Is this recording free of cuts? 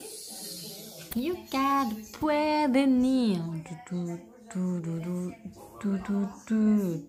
no; 1 cut; at 1.1 s

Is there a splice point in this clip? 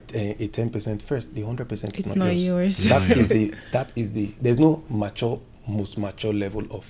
no; 0 cuts

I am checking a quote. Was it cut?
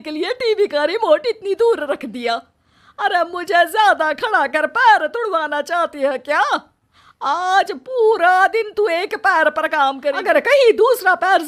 yes; 1 cut; at 10.1 s

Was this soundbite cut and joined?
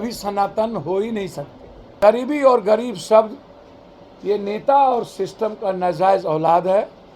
yes; 1 cut; at 2.0 s

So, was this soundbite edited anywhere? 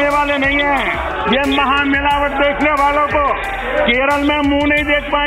yes; 2 cuts; at 1.0 s, 3.5 s

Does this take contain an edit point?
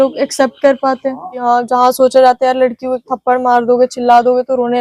yes; 1 cut; at 1.3 s

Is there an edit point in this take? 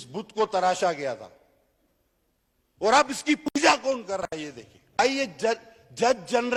no; 0 cuts

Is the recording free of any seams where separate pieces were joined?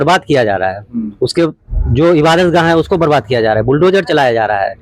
yes; 0 cuts

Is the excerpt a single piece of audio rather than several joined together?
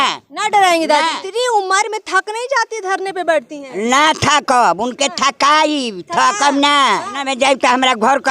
no; 2 cuts; at 1.2 s, 7.2 s

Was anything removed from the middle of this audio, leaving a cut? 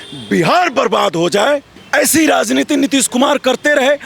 yes; 1 cut; at 1.8 s

